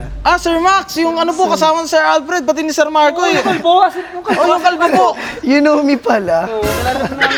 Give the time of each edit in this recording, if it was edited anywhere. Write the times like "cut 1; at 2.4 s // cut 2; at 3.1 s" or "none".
none

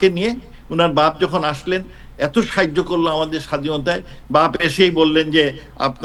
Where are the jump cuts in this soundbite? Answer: none

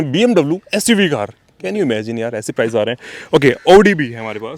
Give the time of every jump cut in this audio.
none

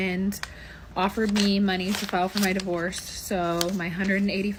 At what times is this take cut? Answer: none

